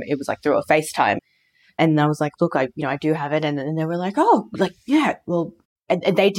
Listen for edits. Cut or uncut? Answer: uncut